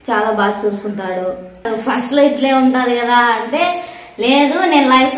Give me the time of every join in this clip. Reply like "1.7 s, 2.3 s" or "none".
1.7 s